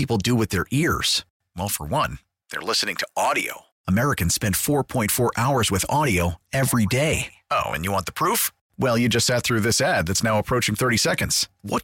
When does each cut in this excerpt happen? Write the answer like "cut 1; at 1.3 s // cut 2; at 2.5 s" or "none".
none